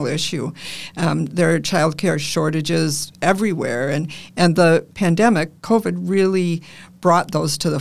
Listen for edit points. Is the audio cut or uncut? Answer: uncut